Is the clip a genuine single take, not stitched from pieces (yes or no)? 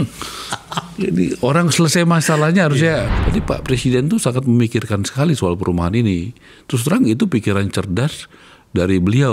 no